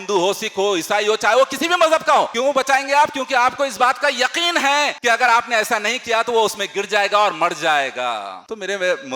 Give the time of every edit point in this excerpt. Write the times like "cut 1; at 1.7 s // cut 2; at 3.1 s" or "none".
cut 1; at 2.3 s // cut 2; at 5.0 s